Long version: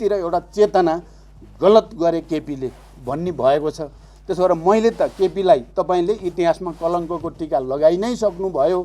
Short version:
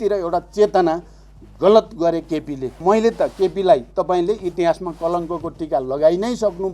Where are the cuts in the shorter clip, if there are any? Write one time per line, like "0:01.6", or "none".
0:02.8